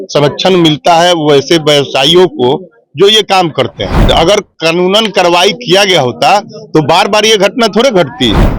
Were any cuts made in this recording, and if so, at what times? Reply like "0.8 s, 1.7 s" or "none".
3.9 s